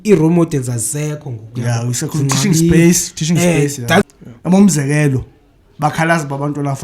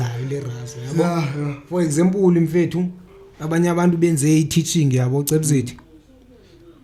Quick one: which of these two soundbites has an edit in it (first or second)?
first